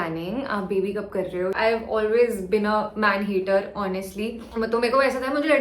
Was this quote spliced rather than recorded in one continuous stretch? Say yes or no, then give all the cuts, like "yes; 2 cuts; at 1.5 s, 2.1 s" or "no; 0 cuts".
yes; 1 cut; at 1.5 s